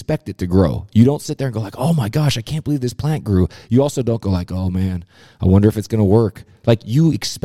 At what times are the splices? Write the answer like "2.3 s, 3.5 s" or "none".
none